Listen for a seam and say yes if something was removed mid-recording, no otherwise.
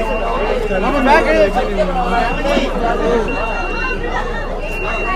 no